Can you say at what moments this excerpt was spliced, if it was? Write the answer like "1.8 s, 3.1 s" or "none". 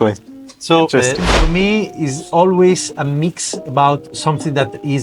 1.5 s